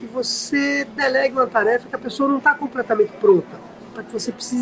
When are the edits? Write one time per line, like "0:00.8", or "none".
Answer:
none